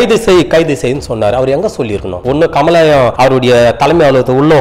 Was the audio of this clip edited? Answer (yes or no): yes